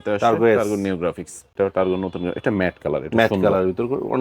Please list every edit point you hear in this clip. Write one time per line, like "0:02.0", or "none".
0:01.4